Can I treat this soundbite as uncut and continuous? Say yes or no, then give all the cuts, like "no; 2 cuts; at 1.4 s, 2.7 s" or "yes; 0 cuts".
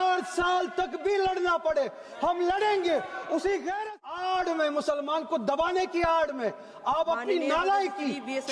no; 1 cut; at 3.8 s